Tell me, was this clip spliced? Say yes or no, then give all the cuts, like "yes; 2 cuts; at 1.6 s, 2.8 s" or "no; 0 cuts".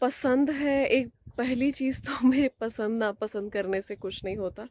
no; 0 cuts